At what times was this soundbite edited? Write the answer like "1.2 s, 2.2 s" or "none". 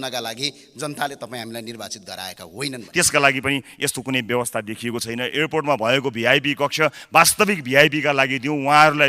2.8 s